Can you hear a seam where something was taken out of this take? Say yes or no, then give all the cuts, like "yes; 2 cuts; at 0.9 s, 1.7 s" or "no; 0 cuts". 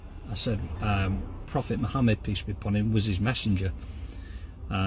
no; 0 cuts